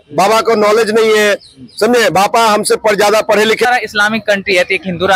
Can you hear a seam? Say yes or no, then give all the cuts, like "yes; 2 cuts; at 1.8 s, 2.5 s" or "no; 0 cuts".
yes; 1 cut; at 3.7 s